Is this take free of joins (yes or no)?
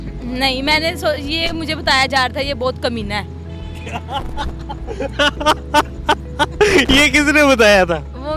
yes